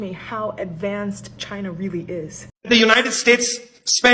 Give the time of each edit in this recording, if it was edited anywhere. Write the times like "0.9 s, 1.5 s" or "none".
2.4 s